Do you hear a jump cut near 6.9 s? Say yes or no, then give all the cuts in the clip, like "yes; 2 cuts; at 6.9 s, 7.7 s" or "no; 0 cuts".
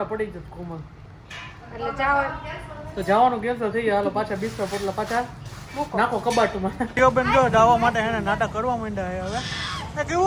yes; 1 cut; at 6.9 s